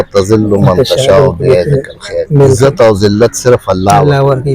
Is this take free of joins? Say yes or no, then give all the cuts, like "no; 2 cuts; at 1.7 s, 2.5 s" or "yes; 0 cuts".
yes; 0 cuts